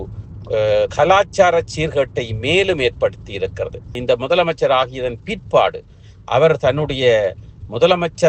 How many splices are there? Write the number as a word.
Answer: one